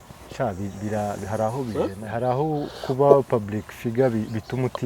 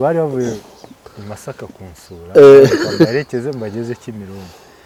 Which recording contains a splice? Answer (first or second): first